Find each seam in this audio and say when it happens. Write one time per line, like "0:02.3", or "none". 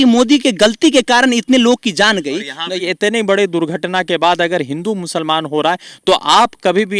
0:02.8